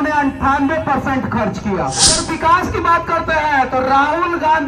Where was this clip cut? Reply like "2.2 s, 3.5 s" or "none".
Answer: 2.2 s

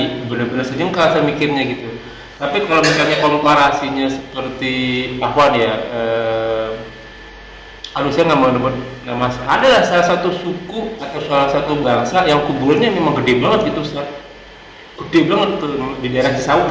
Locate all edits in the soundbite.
none

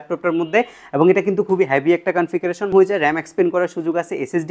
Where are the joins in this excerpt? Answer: 2.7 s

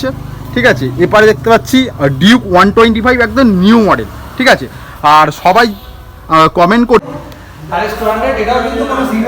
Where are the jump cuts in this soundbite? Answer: 7.1 s

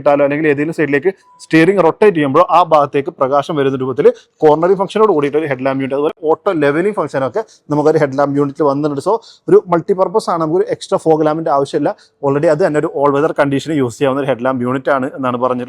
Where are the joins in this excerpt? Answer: none

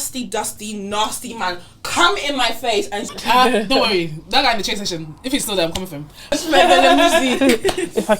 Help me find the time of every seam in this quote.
3.1 s, 6.4 s

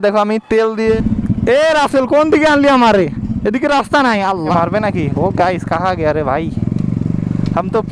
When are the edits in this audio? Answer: 1.0 s, 4.5 s

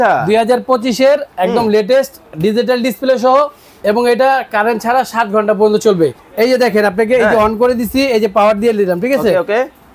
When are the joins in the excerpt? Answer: 6.2 s

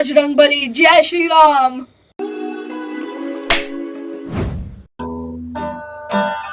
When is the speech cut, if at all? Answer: 4.8 s

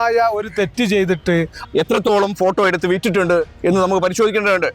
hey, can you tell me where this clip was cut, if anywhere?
1.6 s

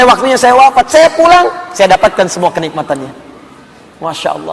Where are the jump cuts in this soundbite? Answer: none

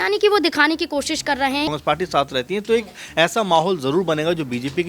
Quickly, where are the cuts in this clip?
1.7 s

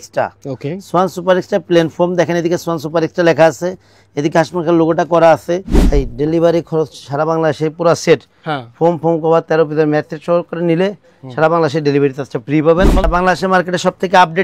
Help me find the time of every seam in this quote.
5.7 s, 13.1 s

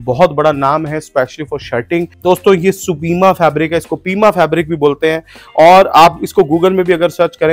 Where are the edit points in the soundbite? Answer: 2.1 s

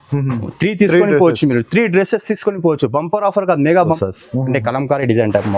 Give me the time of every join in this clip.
4.0 s

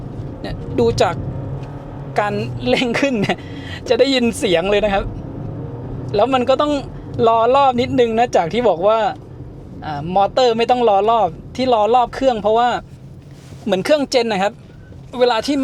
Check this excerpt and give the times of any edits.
none

